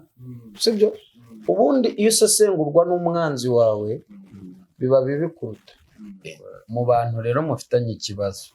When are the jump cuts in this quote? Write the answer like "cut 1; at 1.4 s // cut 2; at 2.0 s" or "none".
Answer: cut 1; at 6.3 s